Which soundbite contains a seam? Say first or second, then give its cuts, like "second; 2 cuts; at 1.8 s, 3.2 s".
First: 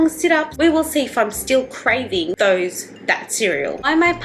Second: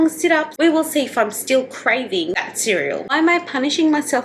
second; 1 cut; at 2.4 s